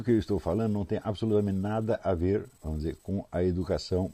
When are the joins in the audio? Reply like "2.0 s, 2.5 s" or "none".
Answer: none